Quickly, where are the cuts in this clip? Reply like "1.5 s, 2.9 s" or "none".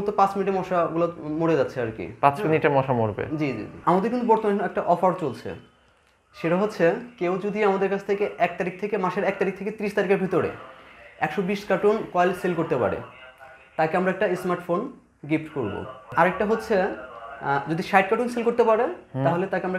3.7 s, 16.0 s